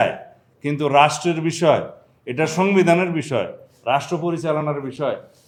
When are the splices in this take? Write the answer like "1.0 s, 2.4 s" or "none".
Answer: none